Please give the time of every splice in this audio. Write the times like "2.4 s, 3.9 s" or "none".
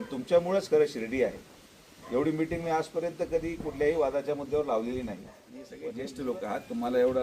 5.7 s